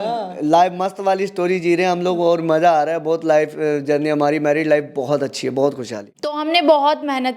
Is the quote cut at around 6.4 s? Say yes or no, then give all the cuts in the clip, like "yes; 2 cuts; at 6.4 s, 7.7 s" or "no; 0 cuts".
yes; 1 cut; at 6.4 s